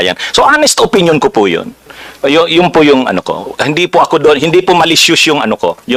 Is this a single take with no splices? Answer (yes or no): yes